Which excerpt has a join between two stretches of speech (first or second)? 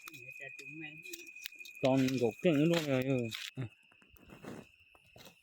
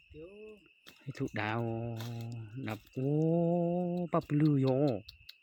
first